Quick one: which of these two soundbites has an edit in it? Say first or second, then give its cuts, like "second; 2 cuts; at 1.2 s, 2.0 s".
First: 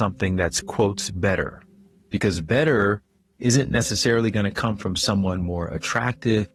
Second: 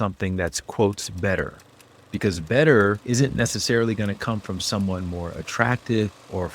second; 1 cut; at 3.0 s